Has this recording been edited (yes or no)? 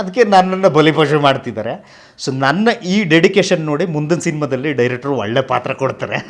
no